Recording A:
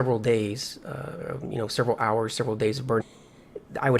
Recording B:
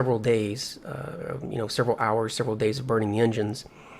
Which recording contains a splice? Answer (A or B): B